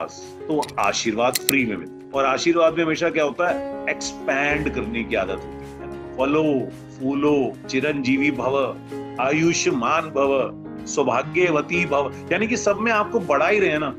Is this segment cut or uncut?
uncut